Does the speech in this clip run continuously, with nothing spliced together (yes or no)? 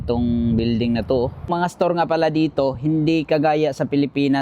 no